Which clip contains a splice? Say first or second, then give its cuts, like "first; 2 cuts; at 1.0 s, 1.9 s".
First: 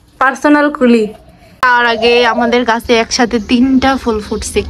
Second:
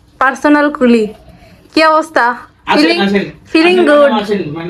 first; 1 cut; at 1.6 s